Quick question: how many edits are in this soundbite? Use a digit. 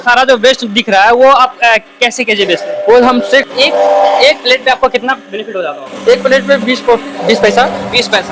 1